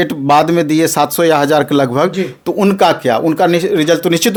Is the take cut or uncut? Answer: uncut